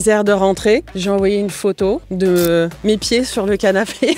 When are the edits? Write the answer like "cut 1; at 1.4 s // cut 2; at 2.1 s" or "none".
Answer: cut 1; at 0.9 s // cut 2; at 2.1 s